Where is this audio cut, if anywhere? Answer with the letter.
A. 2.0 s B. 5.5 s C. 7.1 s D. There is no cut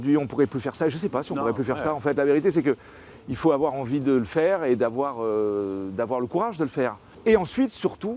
C